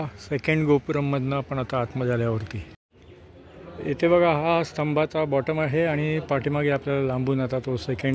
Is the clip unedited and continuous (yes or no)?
yes